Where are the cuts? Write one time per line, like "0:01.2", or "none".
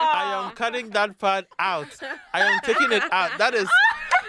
none